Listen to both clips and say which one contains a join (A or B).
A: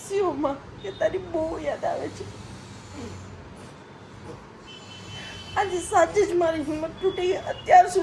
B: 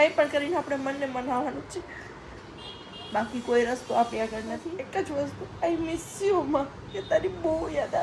B